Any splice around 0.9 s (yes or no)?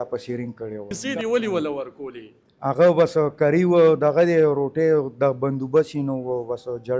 yes